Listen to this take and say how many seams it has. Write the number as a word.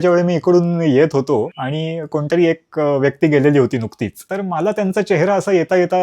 two